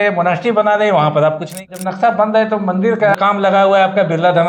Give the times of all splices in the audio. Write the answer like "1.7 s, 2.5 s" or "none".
1.7 s, 3.2 s